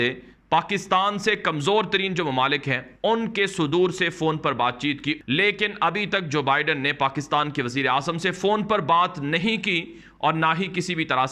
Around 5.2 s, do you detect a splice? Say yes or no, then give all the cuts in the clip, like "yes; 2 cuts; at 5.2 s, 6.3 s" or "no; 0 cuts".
yes; 1 cut; at 5.2 s